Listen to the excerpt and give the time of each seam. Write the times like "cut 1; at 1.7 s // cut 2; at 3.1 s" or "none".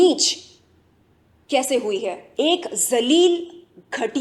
cut 1; at 2.2 s